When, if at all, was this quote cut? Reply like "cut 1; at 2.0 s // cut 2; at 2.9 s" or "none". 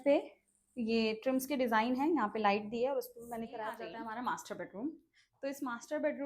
cut 1; at 3.9 s